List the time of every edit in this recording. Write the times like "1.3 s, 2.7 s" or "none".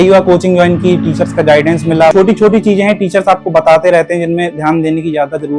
2.1 s